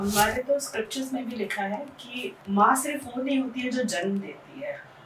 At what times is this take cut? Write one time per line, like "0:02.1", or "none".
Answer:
0:02.4